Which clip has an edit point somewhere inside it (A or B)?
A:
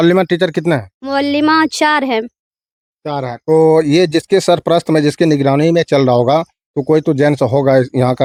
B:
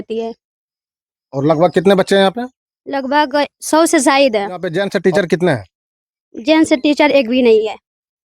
B